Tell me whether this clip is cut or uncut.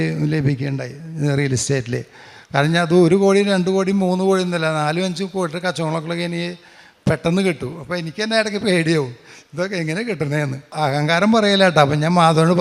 cut